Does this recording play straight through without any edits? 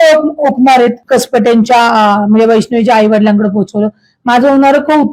no; 1 cut; at 1.0 s

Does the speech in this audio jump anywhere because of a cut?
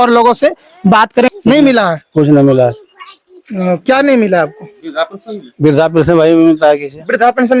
yes; 1 cut; at 1.3 s

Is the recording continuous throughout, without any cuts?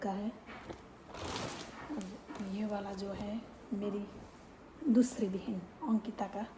yes; 0 cuts

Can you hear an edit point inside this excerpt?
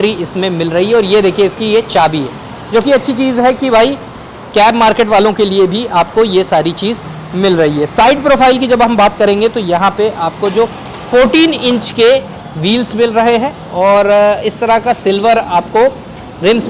no; 0 cuts

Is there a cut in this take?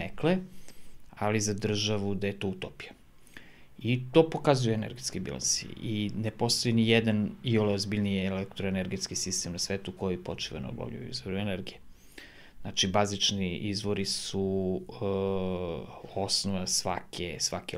no; 0 cuts

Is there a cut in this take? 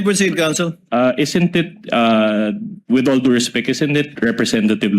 yes; 2 cuts; at 2.7 s, 4.1 s

